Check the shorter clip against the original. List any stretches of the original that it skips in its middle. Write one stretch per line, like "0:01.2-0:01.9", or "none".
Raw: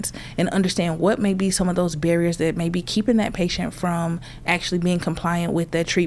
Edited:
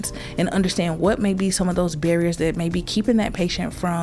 none